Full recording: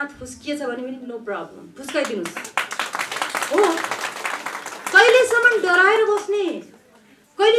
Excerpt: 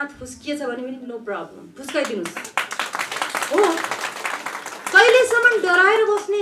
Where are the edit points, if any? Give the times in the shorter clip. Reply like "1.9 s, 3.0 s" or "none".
none